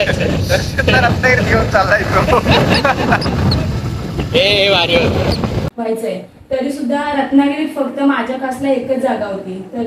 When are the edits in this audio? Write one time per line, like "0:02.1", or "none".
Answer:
0:05.7